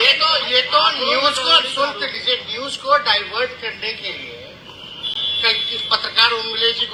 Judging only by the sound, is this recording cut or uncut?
uncut